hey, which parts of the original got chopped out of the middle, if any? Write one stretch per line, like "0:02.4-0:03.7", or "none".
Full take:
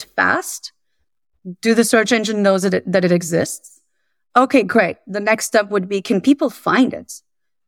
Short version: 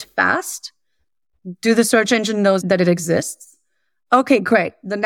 0:02.6-0:02.8